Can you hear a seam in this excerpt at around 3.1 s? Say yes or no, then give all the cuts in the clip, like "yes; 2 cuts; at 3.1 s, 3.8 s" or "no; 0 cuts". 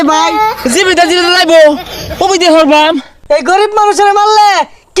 yes; 1 cut; at 3.1 s